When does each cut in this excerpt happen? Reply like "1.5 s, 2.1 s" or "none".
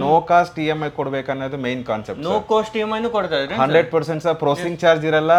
none